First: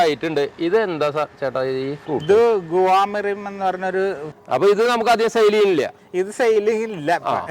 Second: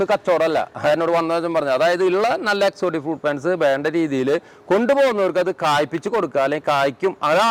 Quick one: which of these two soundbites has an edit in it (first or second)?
first